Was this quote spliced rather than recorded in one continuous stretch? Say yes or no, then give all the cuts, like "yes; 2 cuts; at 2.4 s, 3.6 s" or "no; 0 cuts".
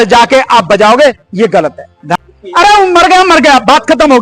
yes; 1 cut; at 2.1 s